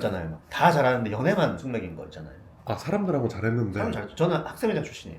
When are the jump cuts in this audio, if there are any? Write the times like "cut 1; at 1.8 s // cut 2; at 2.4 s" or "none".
none